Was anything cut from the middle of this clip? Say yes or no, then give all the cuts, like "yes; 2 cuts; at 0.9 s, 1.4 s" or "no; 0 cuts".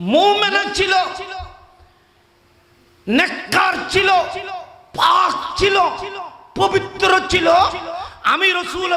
no; 0 cuts